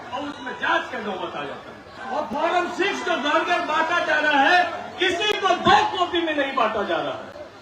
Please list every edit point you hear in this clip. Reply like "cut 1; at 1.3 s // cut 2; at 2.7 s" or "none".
cut 1; at 1.9 s